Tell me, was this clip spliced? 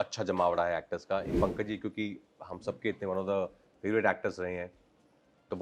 yes; 1 cut; at 1.4 s

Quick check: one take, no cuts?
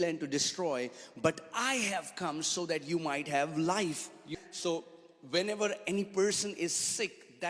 no; 1 cut; at 4.3 s

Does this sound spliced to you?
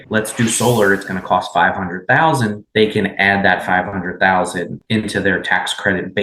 no; 0 cuts

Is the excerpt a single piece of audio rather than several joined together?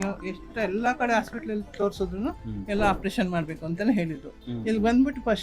no; 1 cut; at 4.4 s

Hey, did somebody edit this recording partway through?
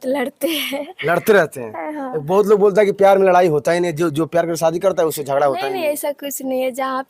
no; 0 cuts

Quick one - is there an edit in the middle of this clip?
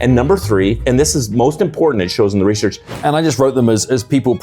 yes; 2 cuts; at 0.8 s, 2.9 s

